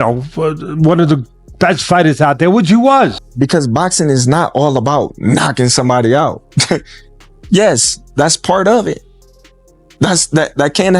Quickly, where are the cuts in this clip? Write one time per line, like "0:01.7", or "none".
0:03.2

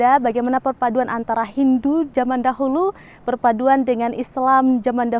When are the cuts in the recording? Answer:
none

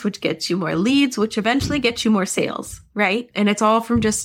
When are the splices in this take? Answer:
0:03.3

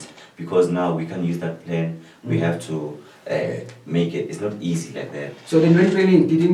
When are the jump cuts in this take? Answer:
none

